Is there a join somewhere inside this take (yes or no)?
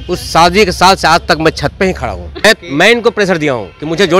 yes